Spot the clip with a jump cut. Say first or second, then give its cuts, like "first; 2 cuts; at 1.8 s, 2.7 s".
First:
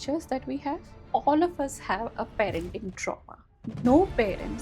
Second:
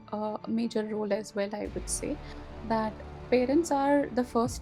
first; 2 cuts; at 0.9 s, 3.8 s